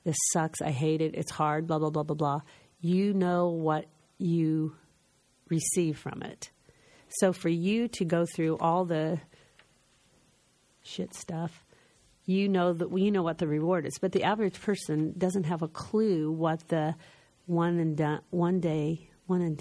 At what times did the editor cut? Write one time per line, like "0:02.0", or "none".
none